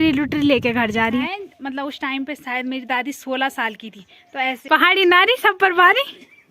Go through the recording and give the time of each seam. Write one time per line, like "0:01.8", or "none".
0:01.4
0:04.6